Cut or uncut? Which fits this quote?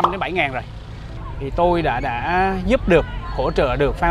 cut